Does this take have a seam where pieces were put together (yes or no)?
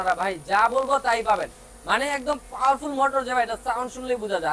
no